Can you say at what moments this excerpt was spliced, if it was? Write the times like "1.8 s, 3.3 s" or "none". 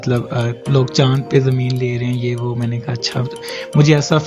none